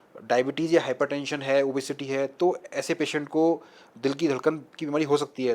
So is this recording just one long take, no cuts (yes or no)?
yes